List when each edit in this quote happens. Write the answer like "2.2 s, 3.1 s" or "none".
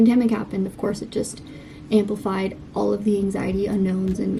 none